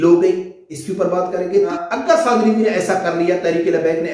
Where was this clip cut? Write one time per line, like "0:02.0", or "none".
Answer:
0:01.7